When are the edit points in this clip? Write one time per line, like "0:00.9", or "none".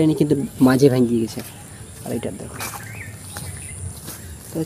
none